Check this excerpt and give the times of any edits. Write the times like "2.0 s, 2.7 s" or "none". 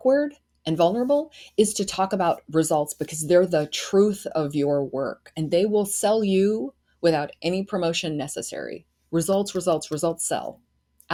none